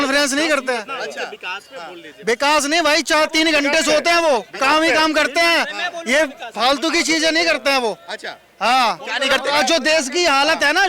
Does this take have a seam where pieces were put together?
no; 0 cuts

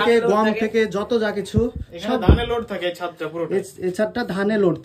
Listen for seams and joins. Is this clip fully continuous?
yes; 0 cuts

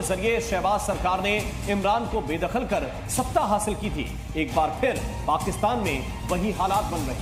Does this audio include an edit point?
no; 0 cuts

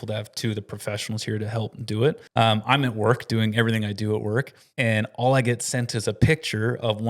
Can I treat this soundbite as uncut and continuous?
no; 2 cuts; at 2.2 s, 4.6 s

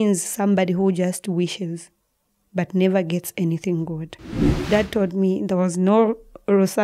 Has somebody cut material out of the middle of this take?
yes; 1 cut; at 4.5 s

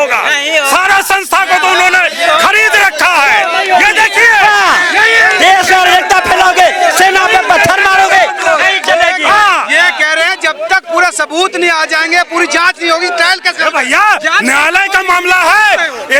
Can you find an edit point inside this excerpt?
no; 0 cuts

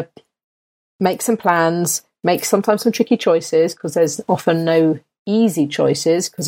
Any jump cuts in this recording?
no; 0 cuts

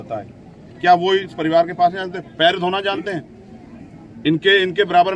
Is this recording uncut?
yes; 0 cuts

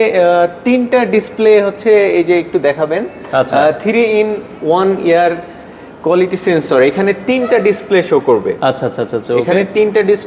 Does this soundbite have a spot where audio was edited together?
no; 0 cuts

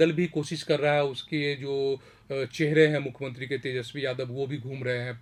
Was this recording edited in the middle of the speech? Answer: no; 0 cuts

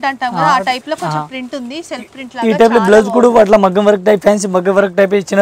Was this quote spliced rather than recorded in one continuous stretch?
no; 0 cuts

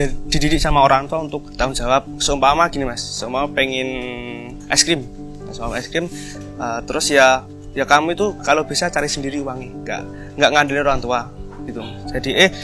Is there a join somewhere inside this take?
yes; 2 cuts; at 1.9 s, 4.5 s

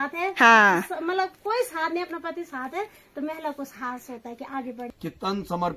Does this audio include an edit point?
yes; 1 cut; at 4.8 s

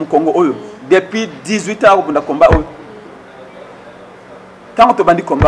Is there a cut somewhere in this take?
no; 0 cuts

